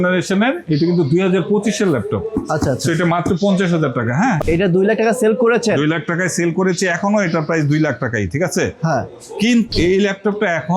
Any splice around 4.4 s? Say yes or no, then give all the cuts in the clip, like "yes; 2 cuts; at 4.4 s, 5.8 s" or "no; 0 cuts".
yes; 2 cuts; at 4.4 s, 9.7 s